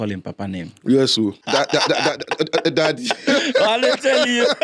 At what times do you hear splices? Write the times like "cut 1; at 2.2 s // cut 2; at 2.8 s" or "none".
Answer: cut 1; at 1.4 s